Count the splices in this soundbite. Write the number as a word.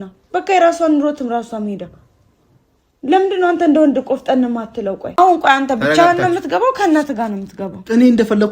one